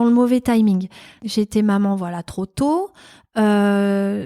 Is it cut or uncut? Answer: cut